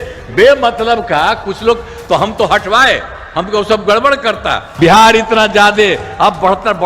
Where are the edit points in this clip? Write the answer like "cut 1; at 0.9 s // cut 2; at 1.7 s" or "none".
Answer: cut 1; at 4.6 s